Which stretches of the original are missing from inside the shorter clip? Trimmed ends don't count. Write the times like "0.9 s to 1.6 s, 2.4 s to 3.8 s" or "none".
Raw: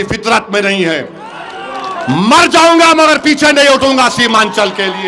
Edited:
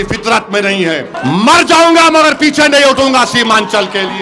1.1 s to 2.0 s